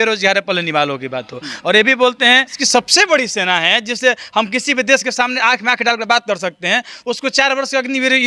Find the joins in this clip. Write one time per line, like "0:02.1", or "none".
0:02.6